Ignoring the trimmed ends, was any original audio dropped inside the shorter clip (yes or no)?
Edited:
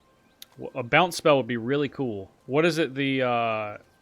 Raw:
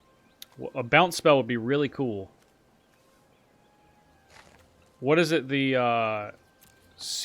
yes